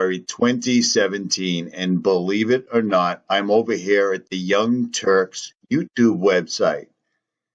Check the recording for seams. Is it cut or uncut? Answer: uncut